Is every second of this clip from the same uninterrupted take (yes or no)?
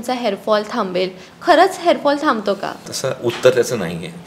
no